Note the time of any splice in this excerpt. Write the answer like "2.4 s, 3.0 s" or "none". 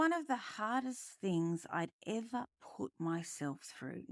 none